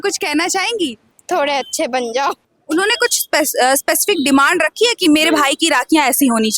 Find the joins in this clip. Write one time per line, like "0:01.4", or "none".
0:01.1
0:02.5